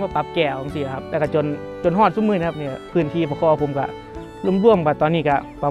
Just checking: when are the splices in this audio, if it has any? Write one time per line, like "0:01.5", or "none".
none